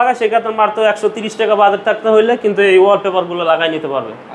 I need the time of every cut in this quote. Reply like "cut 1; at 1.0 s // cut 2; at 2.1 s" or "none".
none

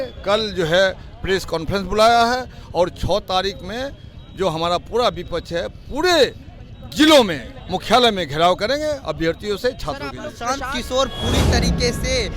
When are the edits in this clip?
cut 1; at 10.4 s

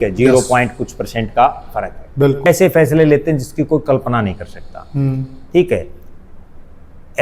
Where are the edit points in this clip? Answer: cut 1; at 2.5 s

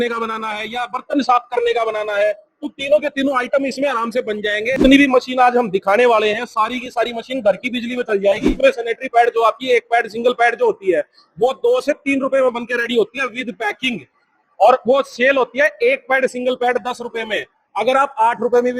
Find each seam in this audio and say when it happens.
cut 1; at 4.7 s // cut 2; at 8.5 s

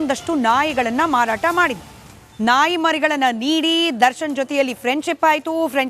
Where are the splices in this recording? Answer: cut 1; at 1.3 s

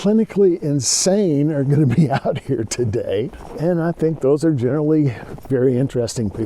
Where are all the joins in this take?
cut 1; at 3.4 s // cut 2; at 5.3 s

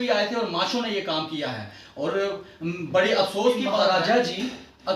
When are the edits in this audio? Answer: cut 1; at 3.8 s

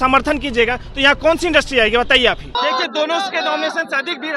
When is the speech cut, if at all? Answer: cut 1; at 2.5 s

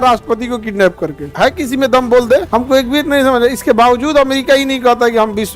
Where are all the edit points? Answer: cut 1; at 1.2 s // cut 2; at 2.5 s

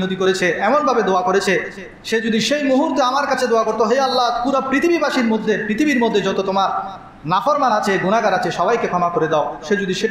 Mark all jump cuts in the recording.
none

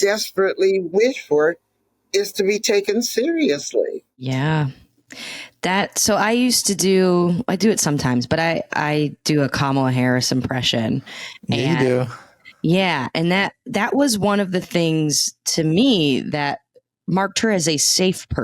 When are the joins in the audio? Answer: none

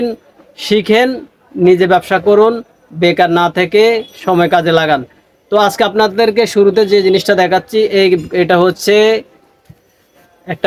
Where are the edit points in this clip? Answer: none

